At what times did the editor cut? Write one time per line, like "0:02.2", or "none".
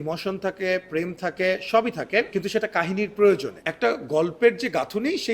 0:02.3
0:03.6